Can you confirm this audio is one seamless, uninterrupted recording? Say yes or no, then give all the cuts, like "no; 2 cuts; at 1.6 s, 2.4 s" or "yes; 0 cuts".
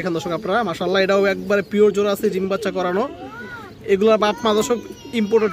yes; 0 cuts